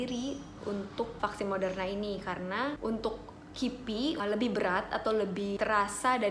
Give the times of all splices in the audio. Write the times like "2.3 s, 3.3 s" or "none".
4.2 s